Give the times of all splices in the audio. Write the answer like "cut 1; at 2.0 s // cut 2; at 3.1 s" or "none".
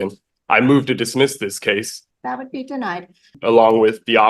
cut 1; at 2.0 s // cut 2; at 3.3 s